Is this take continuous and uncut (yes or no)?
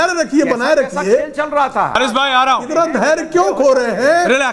no